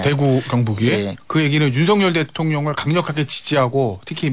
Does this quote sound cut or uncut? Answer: cut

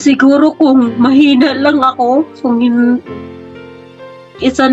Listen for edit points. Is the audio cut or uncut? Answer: uncut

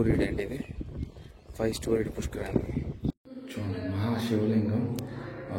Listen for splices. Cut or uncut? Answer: cut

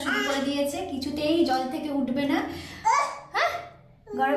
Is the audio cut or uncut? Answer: uncut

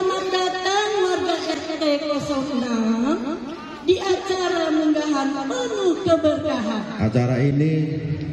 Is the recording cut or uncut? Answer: cut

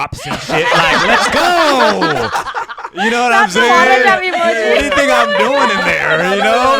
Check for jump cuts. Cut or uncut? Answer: uncut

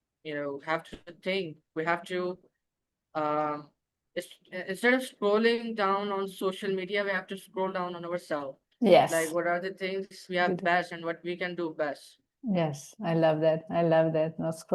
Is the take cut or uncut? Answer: uncut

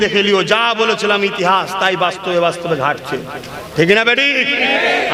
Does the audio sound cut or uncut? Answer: uncut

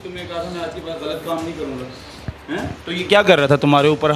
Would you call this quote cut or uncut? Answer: cut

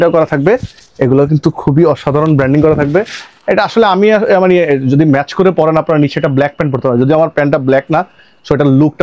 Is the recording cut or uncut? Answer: uncut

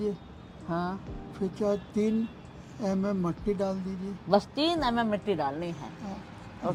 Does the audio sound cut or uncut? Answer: uncut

